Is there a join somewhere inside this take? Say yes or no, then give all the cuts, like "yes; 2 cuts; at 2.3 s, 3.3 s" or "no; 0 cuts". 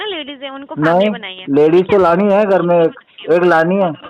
no; 0 cuts